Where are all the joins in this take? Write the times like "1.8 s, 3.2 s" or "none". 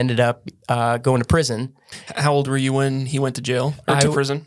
1.8 s